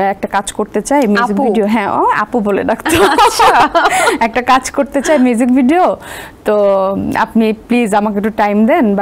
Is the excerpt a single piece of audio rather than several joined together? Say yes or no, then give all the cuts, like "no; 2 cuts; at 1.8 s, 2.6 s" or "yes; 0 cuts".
yes; 0 cuts